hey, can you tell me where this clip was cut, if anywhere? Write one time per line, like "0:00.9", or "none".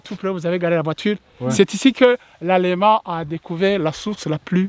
none

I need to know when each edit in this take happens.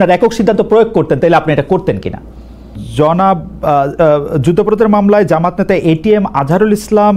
0:02.8

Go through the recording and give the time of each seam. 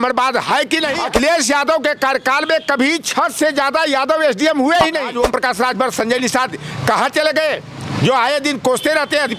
0:01.0
0:05.1

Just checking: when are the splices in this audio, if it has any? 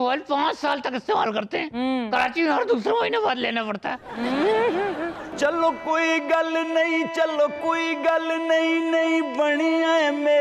0:05.2

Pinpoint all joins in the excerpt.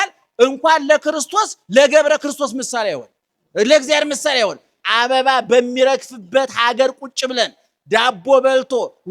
0:04.8

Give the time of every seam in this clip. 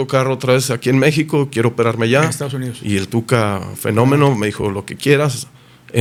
none

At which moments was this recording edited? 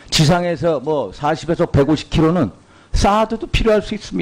0:01.1

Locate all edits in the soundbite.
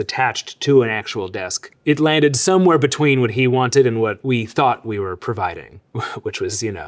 0:04.2

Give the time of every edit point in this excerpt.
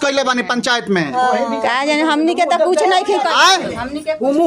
none

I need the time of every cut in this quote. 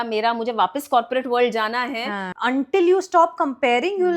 0:02.2

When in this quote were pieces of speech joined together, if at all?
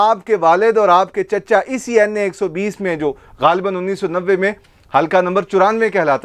none

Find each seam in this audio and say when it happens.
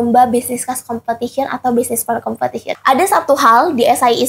0:02.7

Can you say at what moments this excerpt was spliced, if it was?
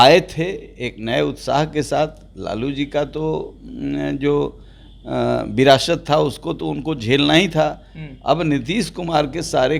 none

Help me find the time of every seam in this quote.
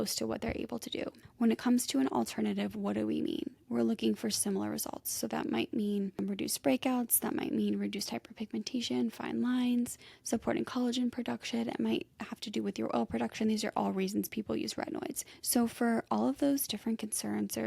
0:01.2

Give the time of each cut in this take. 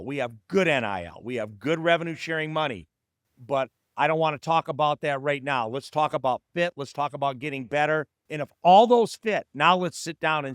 0:08.2

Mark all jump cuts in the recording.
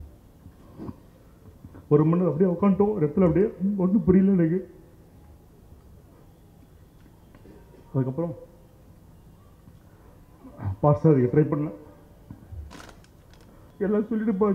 0:13.6

